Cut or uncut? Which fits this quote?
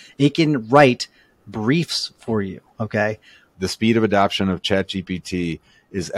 cut